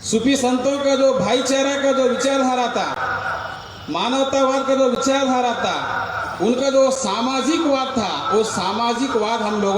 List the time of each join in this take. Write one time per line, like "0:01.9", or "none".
none